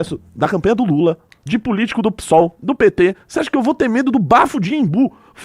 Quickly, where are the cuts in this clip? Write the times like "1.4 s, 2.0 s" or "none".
1.3 s